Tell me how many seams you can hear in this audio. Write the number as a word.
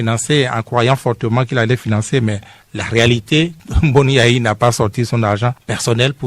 one